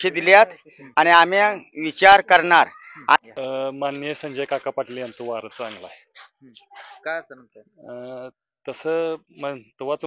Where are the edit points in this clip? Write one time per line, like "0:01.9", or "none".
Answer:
0:03.2

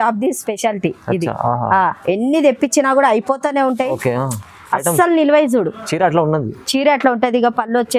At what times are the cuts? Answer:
none

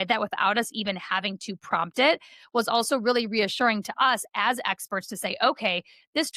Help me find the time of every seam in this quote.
none

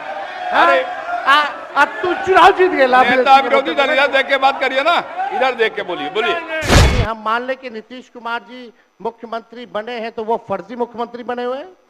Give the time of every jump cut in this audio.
0:06.8

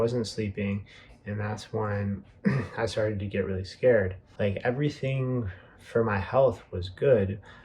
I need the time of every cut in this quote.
0:04.2

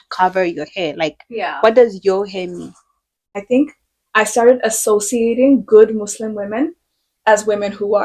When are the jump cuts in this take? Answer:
0:03.4

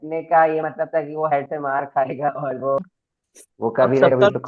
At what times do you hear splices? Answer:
0:02.8

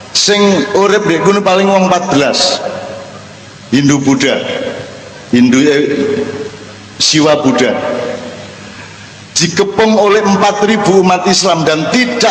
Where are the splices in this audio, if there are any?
none

